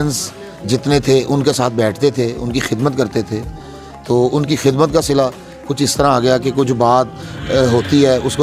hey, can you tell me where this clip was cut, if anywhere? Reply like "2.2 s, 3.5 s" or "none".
none

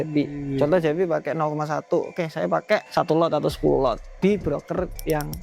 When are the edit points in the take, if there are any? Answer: 2.9 s, 4.1 s

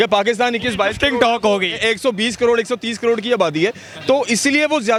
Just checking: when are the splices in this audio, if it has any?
none

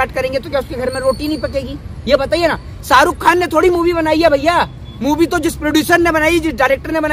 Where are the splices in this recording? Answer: none

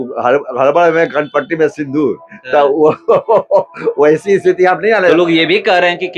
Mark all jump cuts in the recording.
5.1 s

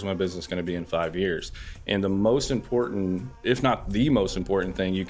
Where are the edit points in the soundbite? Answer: 3.3 s

